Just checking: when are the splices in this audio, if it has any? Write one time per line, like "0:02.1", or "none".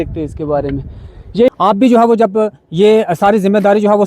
0:01.5

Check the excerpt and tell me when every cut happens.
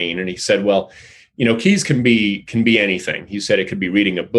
none

